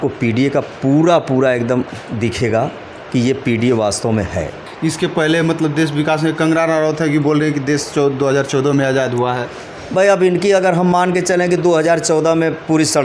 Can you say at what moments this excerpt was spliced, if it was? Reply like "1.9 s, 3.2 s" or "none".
4.6 s